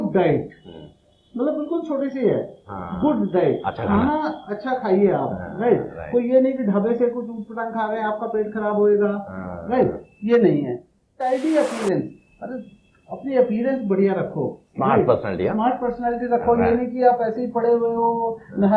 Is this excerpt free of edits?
yes; 0 cuts

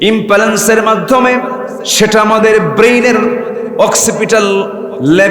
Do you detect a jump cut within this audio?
yes; 1 cut; at 1.8 s

